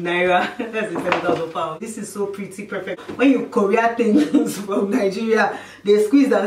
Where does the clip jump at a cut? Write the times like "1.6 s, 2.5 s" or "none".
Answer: 1.8 s, 3.0 s